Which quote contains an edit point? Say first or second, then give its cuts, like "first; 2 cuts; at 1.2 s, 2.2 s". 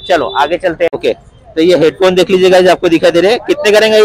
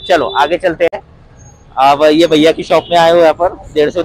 first; 1 cut; at 1.0 s